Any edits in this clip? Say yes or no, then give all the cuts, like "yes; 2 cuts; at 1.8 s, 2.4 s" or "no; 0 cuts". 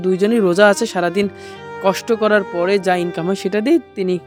no; 0 cuts